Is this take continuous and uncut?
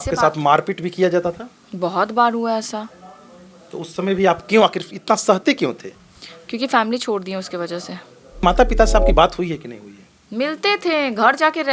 no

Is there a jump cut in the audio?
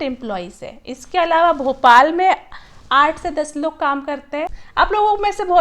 yes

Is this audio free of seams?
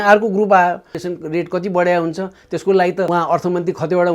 no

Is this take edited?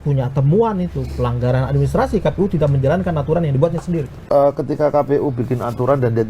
yes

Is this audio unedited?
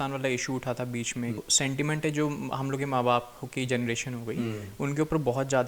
no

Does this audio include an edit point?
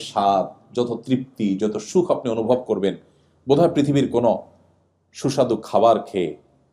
no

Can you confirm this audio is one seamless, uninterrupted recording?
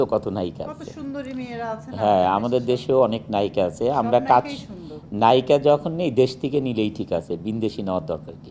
yes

